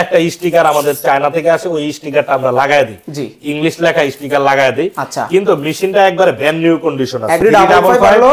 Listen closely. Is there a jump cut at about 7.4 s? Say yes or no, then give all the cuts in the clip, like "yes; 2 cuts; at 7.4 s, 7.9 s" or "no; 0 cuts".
yes; 1 cut; at 7.4 s